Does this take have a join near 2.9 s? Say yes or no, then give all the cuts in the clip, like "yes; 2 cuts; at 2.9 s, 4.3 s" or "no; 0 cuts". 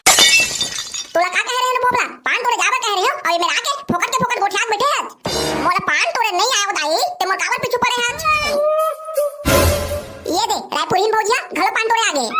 no; 2 cuts; at 5.6 s, 8.5 s